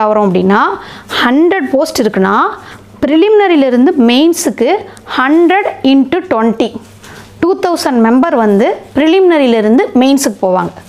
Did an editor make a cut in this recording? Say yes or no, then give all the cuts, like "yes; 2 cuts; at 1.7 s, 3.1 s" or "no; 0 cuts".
no; 0 cuts